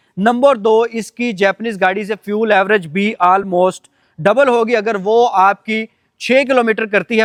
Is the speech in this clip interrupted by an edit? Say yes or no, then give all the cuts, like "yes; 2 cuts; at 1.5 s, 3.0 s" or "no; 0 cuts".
no; 0 cuts